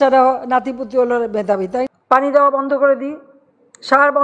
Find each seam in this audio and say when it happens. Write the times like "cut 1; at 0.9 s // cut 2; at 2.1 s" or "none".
cut 1; at 1.9 s